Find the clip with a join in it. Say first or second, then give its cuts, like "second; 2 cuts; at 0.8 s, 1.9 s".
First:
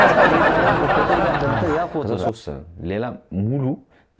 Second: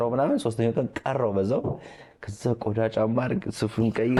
first; 1 cut; at 2.3 s